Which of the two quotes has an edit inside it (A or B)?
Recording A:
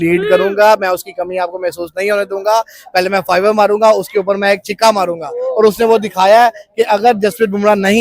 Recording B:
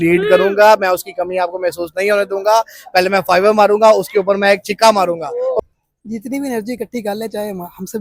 B